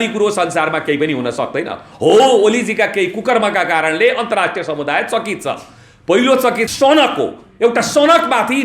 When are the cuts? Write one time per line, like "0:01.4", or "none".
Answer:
0:06.7